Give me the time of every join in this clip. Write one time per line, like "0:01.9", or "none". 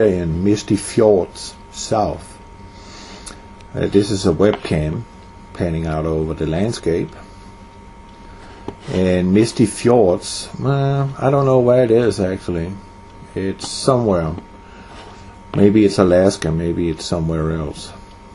none